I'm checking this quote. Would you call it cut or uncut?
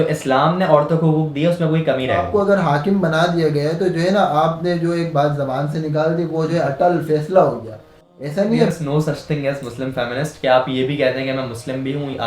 cut